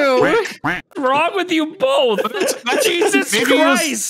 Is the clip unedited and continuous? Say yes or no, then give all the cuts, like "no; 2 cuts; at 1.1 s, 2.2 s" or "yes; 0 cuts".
no; 1 cut; at 2.2 s